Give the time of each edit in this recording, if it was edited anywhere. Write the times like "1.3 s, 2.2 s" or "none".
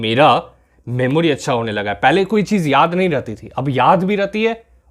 none